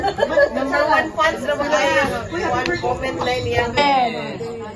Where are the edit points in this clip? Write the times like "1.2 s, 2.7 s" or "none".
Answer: 3.7 s